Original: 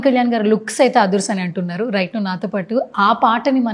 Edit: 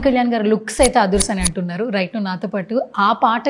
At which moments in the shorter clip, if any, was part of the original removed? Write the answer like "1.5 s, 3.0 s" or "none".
none